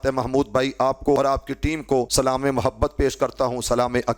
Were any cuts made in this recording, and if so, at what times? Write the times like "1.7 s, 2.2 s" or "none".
1.2 s, 2.1 s